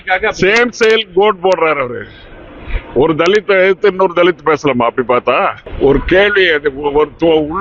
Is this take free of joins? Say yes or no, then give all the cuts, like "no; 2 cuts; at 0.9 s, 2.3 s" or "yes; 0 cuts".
no; 1 cut; at 5.6 s